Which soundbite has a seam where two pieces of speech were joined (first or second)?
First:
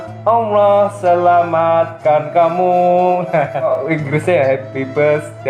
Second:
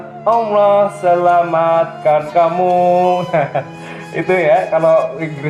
first